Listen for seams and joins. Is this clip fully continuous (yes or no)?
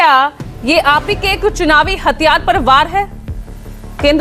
yes